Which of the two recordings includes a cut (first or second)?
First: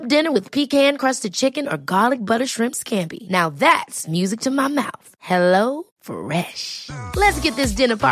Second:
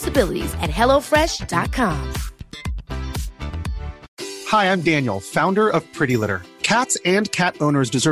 second